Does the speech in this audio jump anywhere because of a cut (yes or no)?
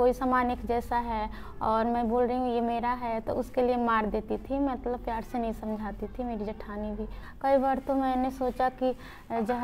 yes